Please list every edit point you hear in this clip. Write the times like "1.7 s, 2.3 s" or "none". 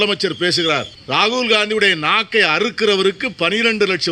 0.9 s